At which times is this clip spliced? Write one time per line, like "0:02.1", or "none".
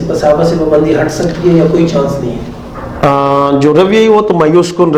none